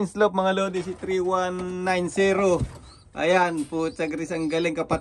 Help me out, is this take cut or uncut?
uncut